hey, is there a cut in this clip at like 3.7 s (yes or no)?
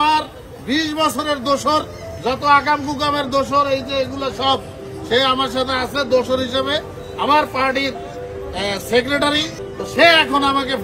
no